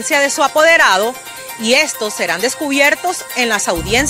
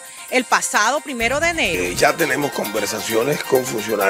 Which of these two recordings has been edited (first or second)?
second